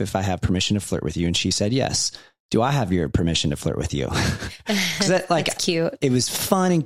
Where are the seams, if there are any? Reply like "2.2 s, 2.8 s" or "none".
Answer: none